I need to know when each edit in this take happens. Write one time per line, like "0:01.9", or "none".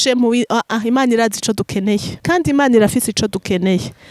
0:02.2